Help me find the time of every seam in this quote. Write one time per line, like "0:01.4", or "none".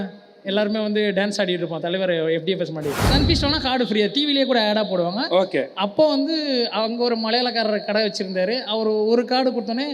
0:03.0